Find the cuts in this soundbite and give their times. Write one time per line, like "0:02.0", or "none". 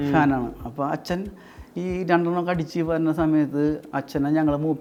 none